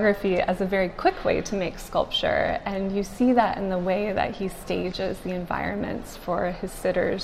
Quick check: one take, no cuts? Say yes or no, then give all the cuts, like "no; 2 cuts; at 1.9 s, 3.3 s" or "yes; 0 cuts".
yes; 0 cuts